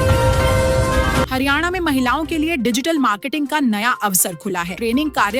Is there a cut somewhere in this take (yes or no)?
yes